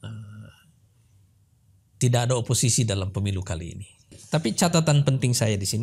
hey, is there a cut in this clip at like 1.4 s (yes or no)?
no